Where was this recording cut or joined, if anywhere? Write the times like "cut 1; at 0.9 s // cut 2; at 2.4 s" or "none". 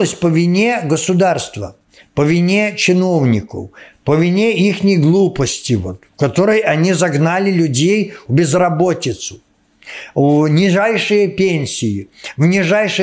none